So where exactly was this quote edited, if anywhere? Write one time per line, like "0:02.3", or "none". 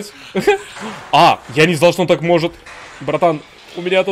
0:01.5